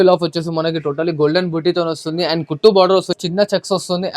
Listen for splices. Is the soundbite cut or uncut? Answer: cut